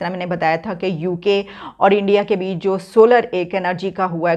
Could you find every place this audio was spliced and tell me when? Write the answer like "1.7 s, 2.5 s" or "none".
none